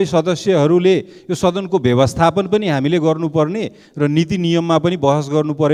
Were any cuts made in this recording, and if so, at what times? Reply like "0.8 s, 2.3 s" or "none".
none

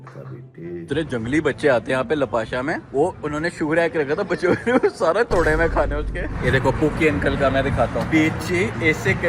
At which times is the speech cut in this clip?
0.9 s, 6.3 s, 8.1 s

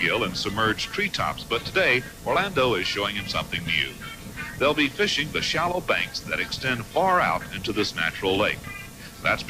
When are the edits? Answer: 2.5 s

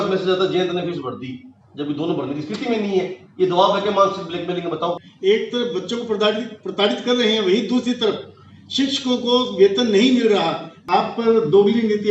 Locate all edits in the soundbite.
5.0 s, 10.7 s

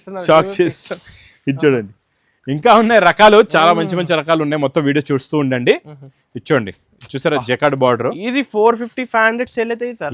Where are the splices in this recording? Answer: none

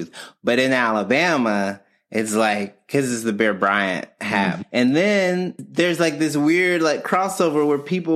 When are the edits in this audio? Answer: 4.6 s, 5.6 s

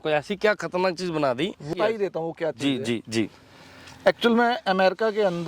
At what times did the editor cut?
1.7 s

